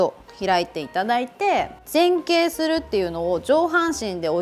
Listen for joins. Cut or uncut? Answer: cut